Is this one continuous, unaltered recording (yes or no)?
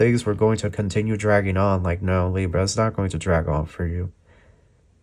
yes